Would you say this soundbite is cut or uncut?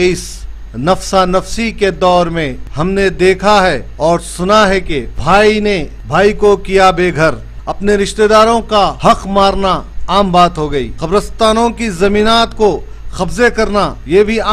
uncut